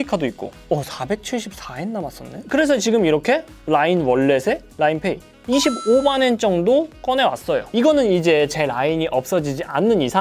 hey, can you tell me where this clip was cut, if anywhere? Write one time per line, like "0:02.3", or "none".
0:02.3